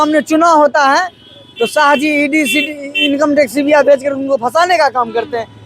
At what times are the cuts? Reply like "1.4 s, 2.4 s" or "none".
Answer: none